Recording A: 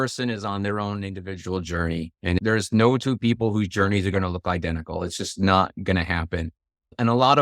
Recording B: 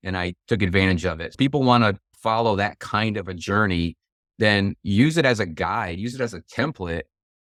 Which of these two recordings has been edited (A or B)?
A